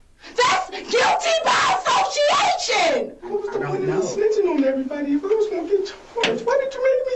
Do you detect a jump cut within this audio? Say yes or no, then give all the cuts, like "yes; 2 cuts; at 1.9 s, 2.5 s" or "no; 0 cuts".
yes; 1 cut; at 3.3 s